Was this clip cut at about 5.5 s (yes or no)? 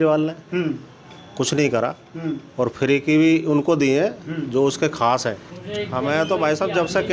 yes